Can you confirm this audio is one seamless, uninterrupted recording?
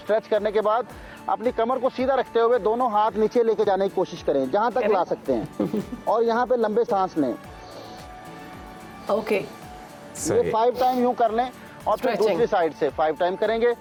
yes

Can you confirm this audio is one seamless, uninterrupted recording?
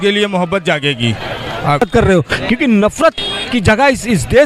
no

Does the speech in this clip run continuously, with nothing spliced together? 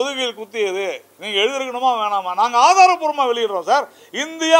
yes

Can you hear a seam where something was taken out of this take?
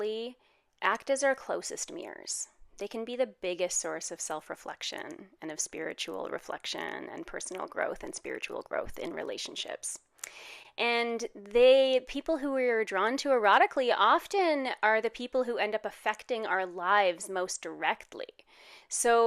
no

